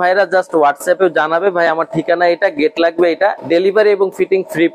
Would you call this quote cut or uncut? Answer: cut